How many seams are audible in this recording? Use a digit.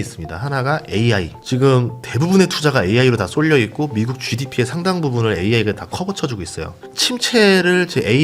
1